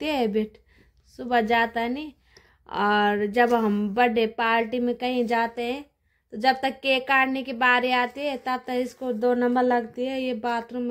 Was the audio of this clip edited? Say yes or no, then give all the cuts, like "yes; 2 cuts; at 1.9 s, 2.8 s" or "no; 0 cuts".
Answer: no; 0 cuts